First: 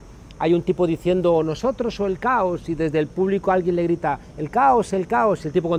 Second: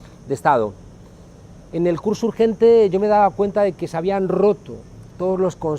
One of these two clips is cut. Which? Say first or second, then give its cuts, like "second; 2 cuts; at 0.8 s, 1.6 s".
second; 1 cut; at 3.5 s